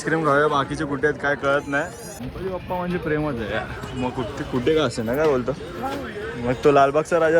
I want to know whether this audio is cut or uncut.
cut